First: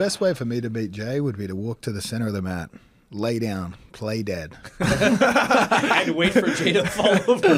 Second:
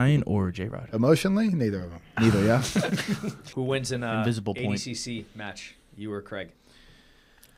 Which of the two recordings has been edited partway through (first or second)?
second